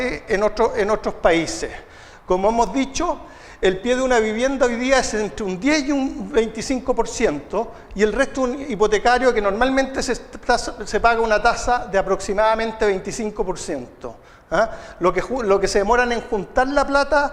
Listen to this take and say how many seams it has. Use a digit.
0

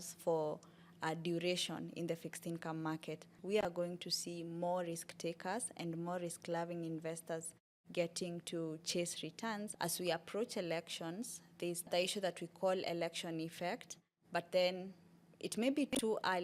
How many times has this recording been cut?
2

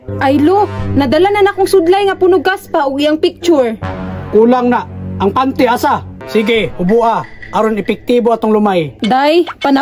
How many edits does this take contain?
1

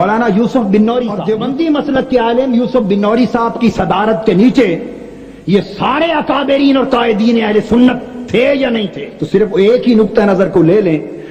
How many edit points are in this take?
2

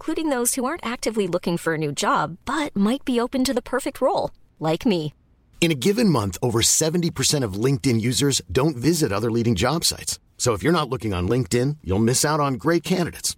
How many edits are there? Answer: 0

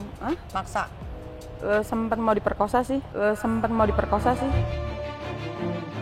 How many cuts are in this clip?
0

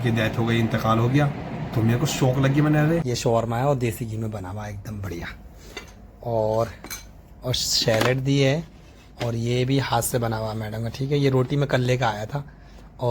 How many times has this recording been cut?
1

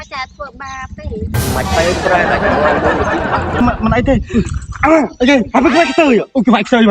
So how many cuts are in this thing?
1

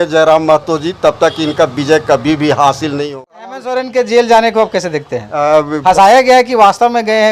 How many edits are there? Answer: 1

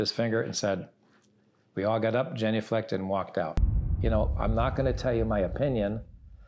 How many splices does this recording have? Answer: 1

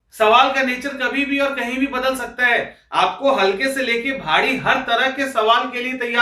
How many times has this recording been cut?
0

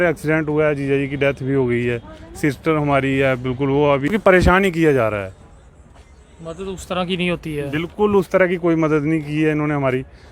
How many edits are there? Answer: 1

